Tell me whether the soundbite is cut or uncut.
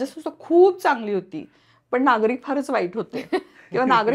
uncut